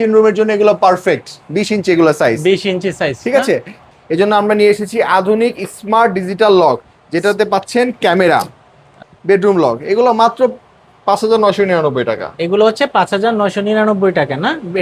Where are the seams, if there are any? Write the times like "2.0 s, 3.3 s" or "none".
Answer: 3.8 s, 9.0 s